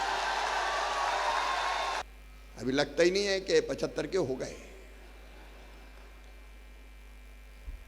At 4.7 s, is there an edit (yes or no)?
no